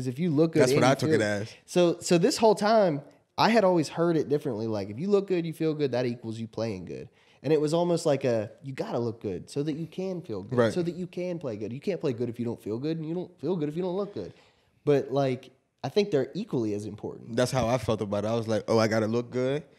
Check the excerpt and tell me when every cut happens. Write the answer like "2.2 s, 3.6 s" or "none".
none